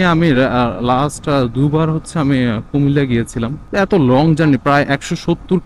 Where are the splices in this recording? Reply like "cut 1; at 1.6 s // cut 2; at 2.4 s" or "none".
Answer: none